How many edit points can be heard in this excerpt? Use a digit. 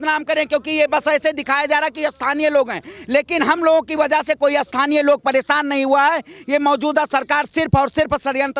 0